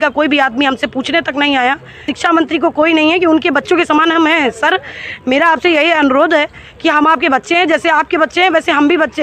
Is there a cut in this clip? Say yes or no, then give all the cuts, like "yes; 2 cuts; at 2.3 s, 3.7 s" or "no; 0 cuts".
yes; 1 cut; at 2.1 s